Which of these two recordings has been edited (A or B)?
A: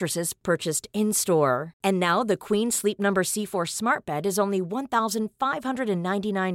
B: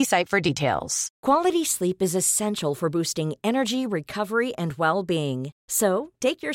B